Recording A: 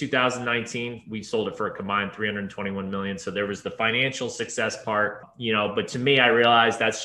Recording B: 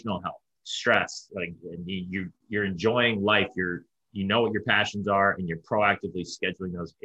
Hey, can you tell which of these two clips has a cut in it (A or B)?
A